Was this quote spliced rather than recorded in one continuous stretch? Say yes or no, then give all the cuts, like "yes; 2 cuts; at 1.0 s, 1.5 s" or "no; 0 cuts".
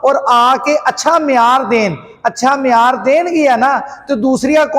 no; 0 cuts